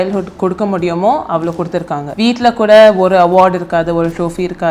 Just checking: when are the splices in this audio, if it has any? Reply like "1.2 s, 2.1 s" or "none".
2.1 s